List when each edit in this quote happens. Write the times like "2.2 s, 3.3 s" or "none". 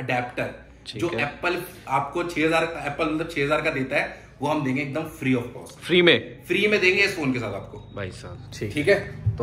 none